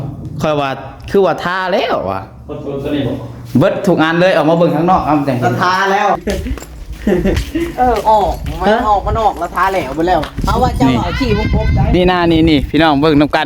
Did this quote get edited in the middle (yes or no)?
yes